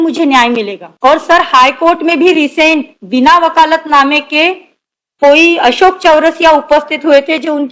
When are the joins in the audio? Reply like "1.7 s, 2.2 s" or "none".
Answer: none

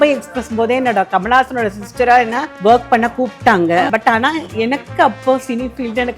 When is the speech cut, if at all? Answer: 2.4 s, 3.9 s

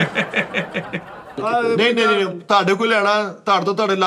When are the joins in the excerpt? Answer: 1.4 s

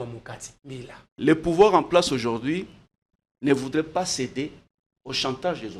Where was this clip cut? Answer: 1.1 s

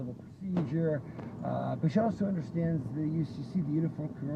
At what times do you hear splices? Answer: 2.5 s

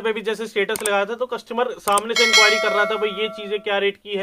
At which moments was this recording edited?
none

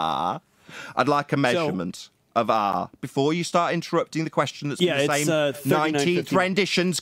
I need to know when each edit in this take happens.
none

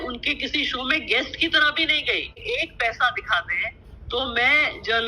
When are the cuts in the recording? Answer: 2.4 s

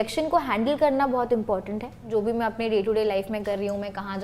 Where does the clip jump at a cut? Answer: 2.0 s

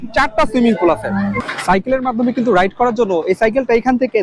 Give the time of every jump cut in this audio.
1.5 s

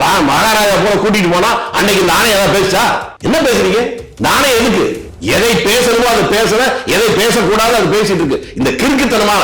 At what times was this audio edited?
3.1 s, 4.0 s, 5.1 s

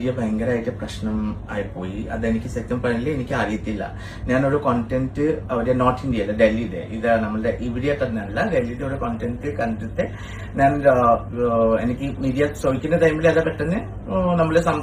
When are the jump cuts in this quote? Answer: none

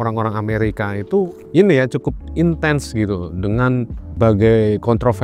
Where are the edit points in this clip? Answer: 4.1 s

